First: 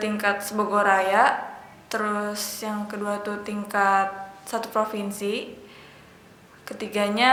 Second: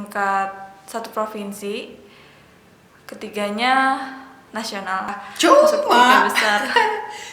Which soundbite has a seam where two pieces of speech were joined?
second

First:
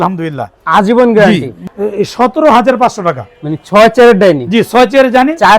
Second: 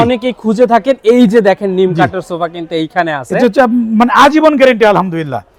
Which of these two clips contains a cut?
first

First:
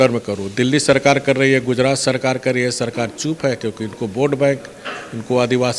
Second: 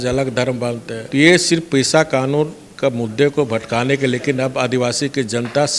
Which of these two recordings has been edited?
second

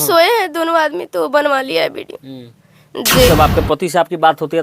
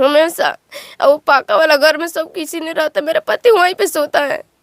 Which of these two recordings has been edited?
first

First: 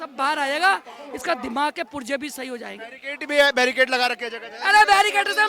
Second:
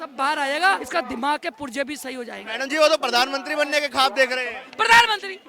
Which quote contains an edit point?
second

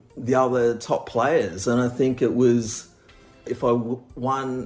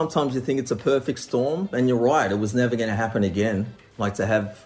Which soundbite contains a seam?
first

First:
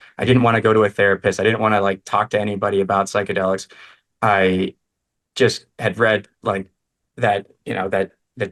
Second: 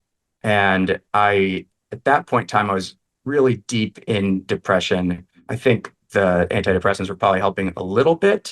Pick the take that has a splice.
second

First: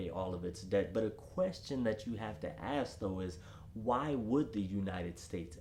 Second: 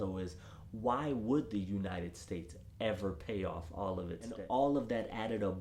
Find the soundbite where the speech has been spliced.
second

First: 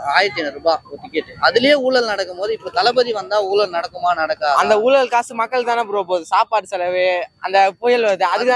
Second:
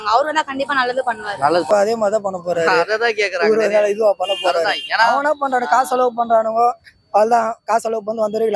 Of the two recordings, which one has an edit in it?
second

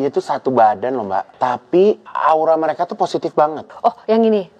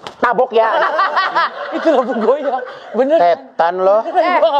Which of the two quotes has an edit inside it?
first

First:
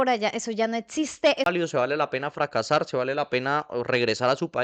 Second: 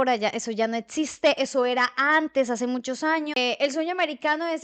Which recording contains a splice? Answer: first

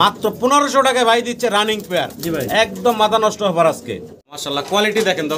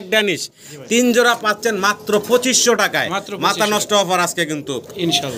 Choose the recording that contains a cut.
first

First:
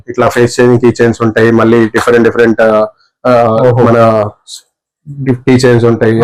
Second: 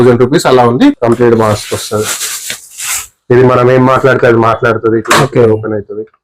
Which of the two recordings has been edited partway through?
second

